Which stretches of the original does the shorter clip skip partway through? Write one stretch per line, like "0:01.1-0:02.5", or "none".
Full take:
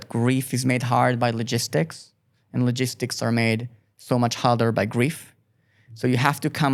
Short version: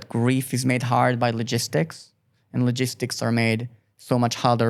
none